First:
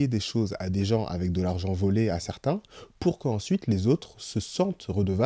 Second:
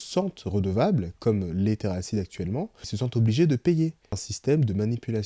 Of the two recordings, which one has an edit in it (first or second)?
second